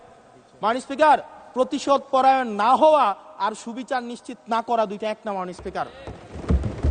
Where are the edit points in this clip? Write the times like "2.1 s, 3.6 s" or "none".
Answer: none